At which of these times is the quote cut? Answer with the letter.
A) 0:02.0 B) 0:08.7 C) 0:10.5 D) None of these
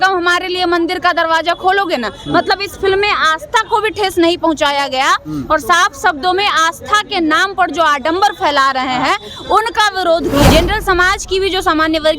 C